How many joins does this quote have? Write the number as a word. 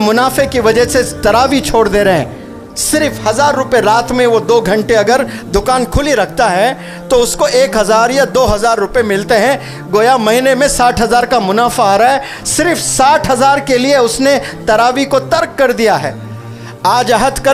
zero